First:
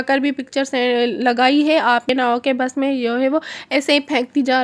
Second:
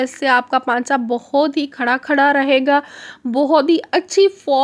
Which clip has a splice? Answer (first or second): first